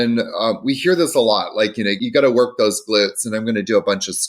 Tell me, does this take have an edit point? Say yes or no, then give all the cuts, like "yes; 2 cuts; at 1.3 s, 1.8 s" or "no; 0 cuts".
yes; 1 cut; at 1.9 s